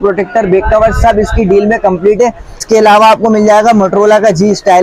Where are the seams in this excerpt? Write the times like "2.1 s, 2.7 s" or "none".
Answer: 2.6 s